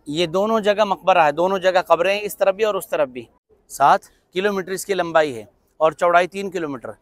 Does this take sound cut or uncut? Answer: cut